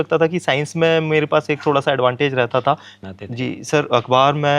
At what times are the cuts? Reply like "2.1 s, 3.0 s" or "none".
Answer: 2.9 s